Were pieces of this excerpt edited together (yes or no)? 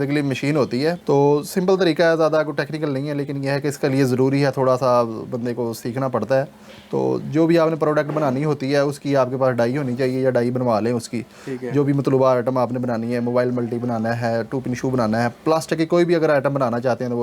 yes